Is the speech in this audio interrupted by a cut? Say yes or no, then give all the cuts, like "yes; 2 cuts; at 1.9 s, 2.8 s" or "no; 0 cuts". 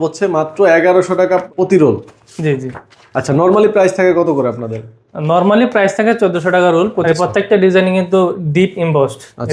yes; 2 cuts; at 1.5 s, 7.0 s